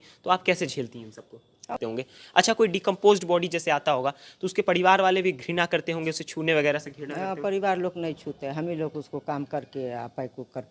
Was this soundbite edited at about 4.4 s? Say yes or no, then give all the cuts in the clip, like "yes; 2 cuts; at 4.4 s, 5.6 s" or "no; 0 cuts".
no; 1 cut; at 1.7 s